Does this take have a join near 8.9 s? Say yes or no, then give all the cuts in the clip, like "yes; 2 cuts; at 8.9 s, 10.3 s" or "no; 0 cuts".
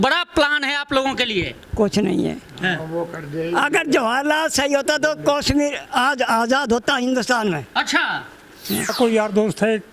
yes; 1 cut; at 8.9 s